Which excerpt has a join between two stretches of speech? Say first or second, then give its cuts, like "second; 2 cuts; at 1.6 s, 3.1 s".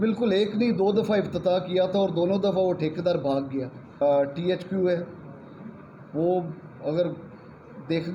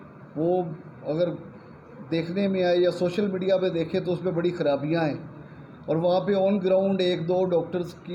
first; 1 cut; at 3.8 s